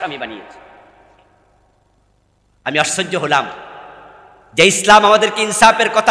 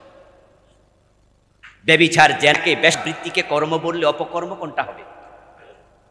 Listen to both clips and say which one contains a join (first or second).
second